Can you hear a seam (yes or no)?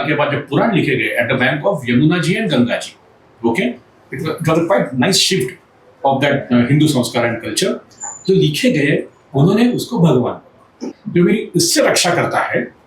yes